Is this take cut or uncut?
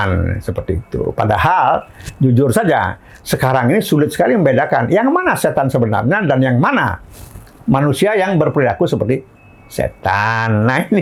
uncut